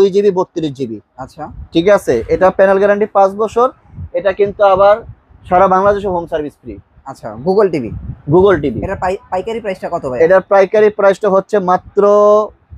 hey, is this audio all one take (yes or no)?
yes